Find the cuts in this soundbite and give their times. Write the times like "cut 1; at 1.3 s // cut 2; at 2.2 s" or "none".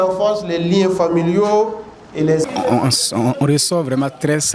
cut 1; at 2.4 s